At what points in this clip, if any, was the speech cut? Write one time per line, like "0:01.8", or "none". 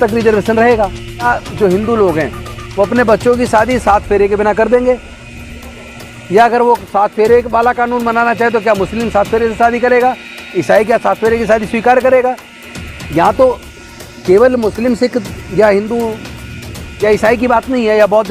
0:01.3